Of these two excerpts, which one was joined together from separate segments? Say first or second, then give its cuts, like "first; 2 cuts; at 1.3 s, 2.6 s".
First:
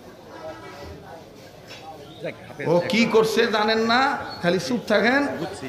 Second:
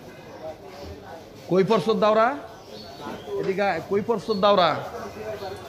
second; 1 cut; at 1.4 s